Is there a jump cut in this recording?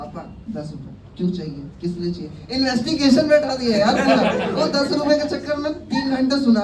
no; 0 cuts

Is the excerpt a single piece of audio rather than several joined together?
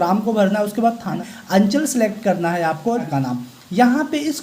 no; 2 cuts; at 1.2 s, 3.0 s

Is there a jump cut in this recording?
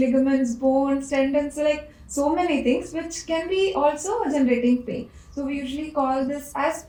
no; 0 cuts

